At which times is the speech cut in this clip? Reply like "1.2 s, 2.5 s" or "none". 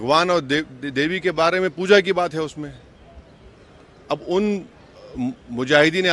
none